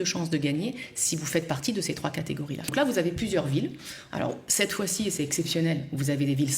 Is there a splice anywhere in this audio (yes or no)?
yes